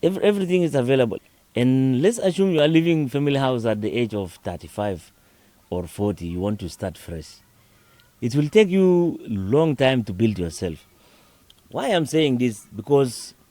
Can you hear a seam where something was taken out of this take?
yes; 1 cut; at 1.1 s

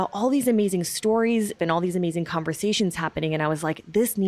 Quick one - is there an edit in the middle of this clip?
yes; 1 cut; at 1.6 s

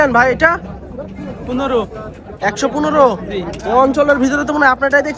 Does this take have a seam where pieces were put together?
no; 0 cuts

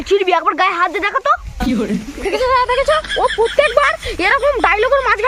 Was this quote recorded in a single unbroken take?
yes; 0 cuts

